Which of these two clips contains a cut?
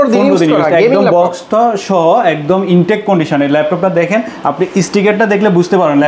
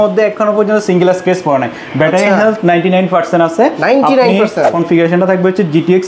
second; 1 cut; at 4.7 s

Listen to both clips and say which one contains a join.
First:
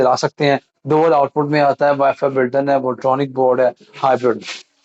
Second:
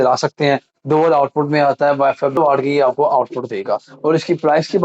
second; 1 cut; at 2.4 s

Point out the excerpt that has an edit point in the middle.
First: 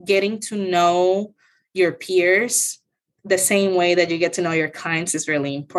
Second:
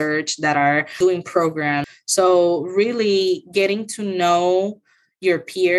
second; 2 cuts; at 0.9 s, 2.0 s

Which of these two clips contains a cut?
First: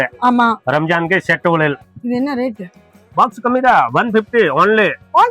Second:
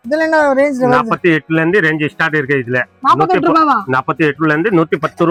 first; 1 cut; at 1.9 s

